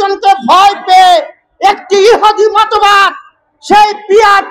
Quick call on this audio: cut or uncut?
uncut